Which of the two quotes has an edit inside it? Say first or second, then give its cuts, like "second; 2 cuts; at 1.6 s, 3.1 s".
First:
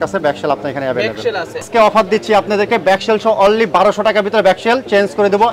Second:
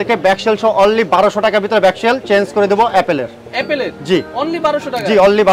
first; 1 cut; at 1.7 s